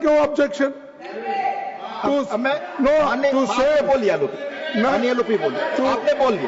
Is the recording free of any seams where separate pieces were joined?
yes; 0 cuts

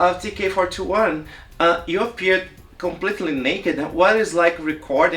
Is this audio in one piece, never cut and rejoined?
yes; 0 cuts

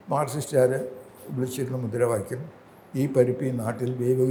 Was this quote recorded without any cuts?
yes; 0 cuts

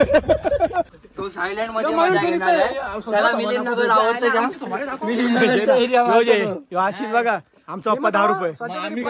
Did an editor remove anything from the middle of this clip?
yes; 1 cut; at 1.0 s

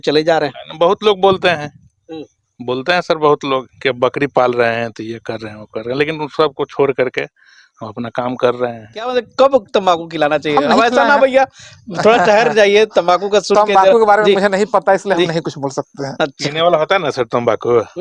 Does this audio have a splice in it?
yes; 1 cut; at 9.1 s

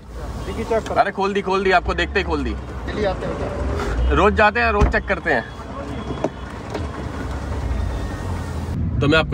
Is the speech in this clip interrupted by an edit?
no; 0 cuts

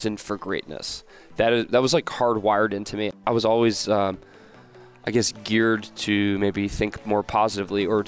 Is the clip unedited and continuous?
no; 1 cut; at 3.2 s

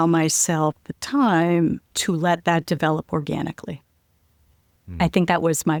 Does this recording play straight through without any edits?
yes; 0 cuts

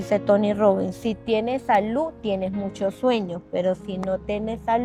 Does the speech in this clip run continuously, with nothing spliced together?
yes; 0 cuts

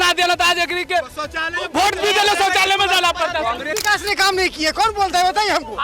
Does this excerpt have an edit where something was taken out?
yes; 1 cut; at 3.8 s

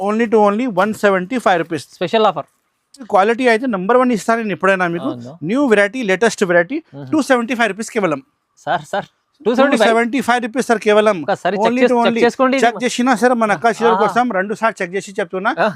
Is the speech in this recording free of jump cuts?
no; 1 cut; at 3.1 s

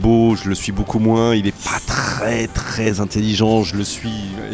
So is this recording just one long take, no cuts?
yes; 0 cuts

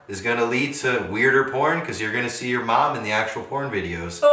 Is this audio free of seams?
yes; 0 cuts

